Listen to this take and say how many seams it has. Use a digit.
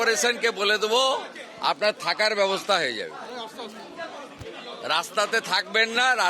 0